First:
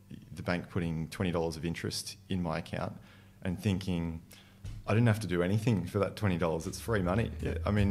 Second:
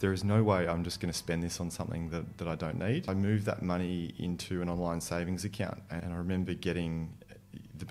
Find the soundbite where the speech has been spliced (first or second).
second